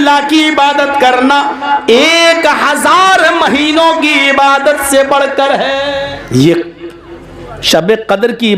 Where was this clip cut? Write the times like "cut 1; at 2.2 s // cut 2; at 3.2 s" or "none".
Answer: cut 1; at 6.1 s